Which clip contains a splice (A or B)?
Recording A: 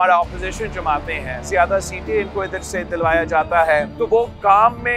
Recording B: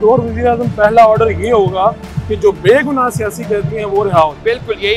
A